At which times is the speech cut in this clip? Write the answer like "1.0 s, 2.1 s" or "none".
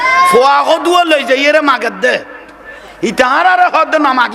none